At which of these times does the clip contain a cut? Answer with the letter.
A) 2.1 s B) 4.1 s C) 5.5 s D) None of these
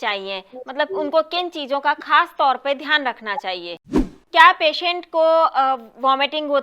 B